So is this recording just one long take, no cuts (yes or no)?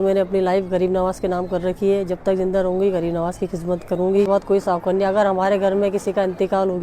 no